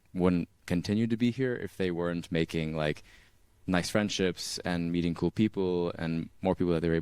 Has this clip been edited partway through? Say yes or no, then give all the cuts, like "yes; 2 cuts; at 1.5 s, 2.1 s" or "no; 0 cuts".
no; 0 cuts